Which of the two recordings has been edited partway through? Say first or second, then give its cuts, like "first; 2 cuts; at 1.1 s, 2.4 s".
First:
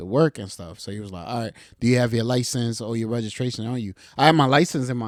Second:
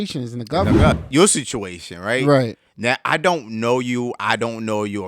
second; 1 cut; at 0.9 s